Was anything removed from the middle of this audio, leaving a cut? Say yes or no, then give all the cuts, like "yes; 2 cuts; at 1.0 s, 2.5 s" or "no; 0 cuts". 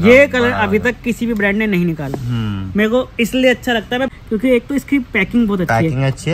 yes; 1 cut; at 4.1 s